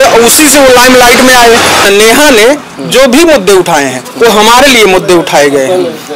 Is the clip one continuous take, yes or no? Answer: no